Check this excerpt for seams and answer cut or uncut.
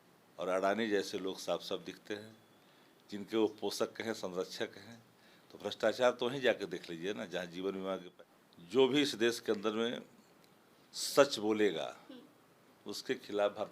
cut